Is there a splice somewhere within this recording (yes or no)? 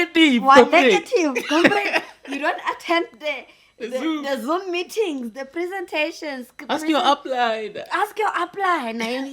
no